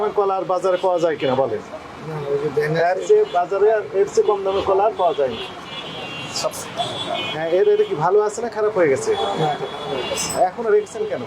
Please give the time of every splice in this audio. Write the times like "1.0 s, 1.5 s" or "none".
6.6 s

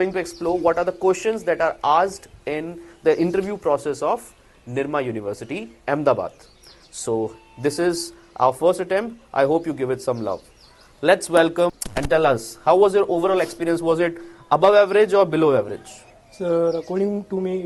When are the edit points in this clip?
none

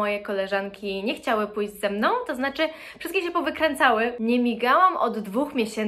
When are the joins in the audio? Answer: 4.2 s

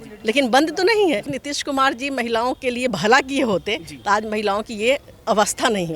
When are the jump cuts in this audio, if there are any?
1.4 s

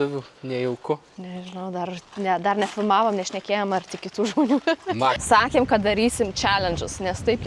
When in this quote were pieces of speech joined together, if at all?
5.2 s

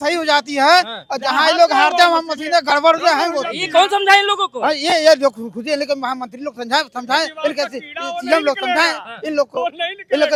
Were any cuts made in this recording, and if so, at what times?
none

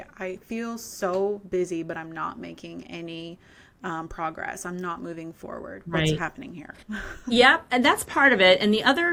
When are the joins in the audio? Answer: none

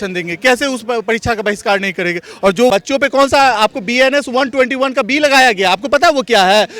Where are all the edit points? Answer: 2.7 s

